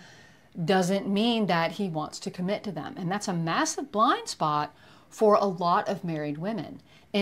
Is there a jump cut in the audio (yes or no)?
no